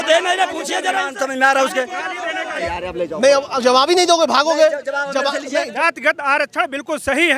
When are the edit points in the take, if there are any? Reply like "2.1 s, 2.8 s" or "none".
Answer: 2.6 s, 5.7 s

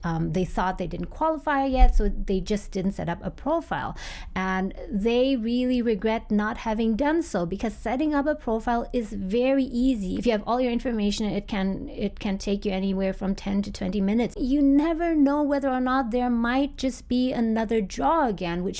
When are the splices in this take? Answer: 10.1 s, 14.4 s

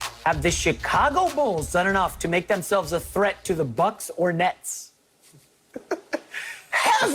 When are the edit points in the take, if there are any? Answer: none

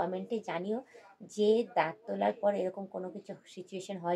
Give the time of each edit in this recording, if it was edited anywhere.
none

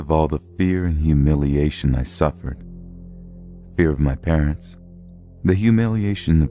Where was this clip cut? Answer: 3.8 s

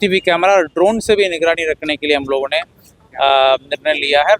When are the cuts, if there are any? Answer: none

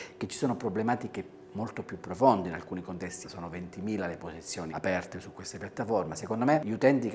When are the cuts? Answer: 3.2 s

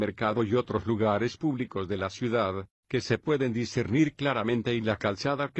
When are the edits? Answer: 1.0 s

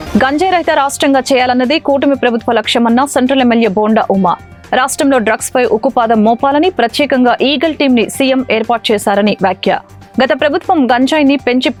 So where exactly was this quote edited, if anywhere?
none

